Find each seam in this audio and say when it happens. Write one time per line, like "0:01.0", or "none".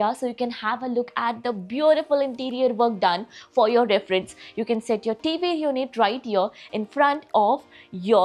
none